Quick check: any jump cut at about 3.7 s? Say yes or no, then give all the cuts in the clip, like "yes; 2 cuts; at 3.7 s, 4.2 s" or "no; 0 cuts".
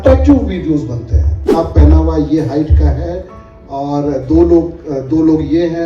no; 1 cut; at 1.6 s